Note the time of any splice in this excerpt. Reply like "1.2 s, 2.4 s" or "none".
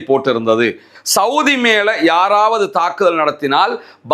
0.9 s

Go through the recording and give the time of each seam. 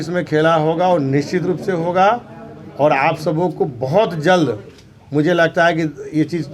none

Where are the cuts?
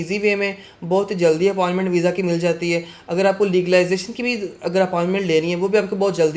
none

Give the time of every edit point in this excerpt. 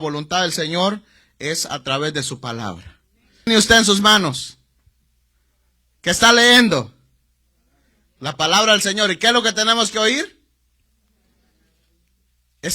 3.5 s

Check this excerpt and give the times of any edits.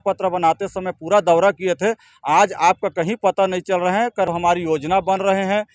4.3 s

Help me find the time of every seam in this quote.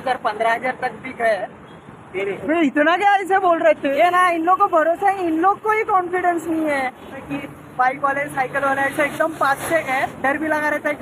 2.4 s, 3.8 s, 7.3 s

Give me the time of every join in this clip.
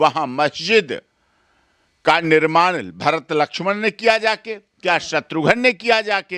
none

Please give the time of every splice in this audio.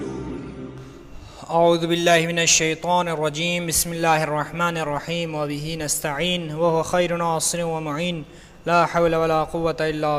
8.6 s

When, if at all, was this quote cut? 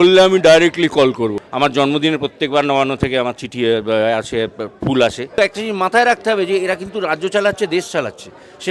1.4 s, 5.4 s

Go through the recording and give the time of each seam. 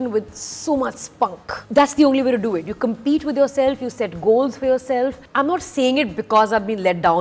1.6 s, 5.2 s

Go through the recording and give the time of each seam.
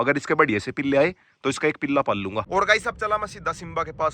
2.5 s

